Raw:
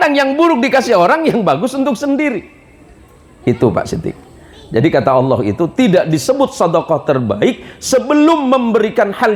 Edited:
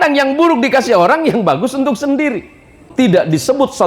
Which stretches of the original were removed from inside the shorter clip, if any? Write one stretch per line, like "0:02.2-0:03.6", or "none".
0:02.9-0:05.7